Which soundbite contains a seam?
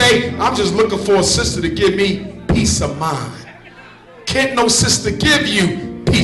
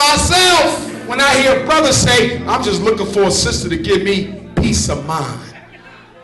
second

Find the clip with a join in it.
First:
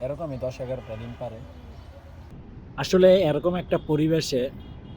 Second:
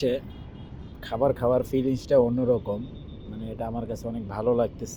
first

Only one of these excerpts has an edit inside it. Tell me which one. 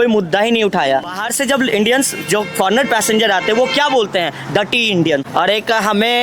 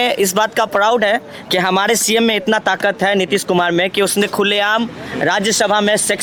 first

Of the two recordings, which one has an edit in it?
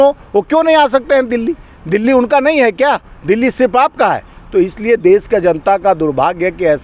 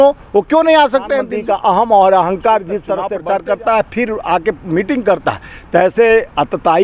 second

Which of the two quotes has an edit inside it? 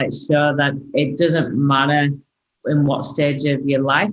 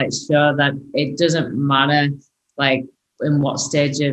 first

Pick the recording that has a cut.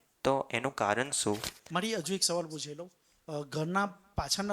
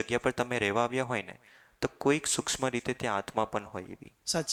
first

